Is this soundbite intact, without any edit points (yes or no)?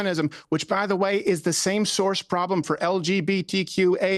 yes